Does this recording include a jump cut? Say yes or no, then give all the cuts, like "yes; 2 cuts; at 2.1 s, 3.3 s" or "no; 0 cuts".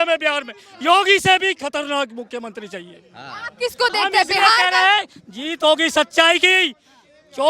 no; 0 cuts